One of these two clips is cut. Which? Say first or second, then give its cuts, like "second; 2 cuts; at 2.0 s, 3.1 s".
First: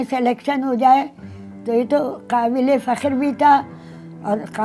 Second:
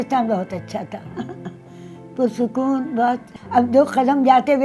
second; 1 cut; at 3.3 s